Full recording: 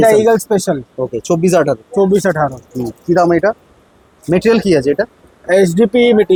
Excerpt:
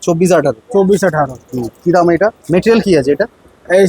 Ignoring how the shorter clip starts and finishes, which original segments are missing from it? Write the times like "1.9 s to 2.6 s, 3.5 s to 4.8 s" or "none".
3.6 s to 4.2 s